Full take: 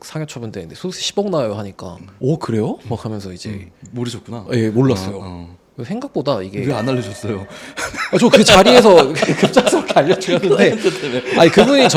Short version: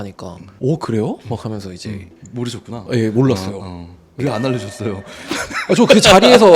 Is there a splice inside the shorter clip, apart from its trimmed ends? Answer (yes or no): yes